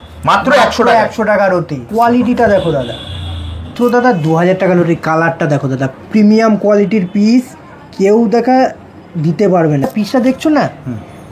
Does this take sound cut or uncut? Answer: cut